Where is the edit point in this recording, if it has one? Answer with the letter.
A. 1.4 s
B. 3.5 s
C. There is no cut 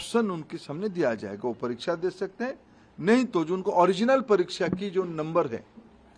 C